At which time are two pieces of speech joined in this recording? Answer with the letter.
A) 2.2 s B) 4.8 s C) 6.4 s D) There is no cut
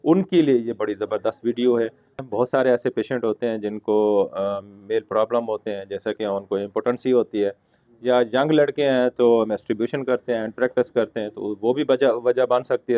A